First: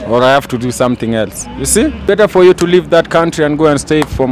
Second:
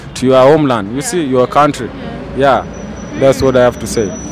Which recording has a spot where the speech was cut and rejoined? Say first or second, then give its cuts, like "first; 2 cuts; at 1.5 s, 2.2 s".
first; 1 cut; at 2.0 s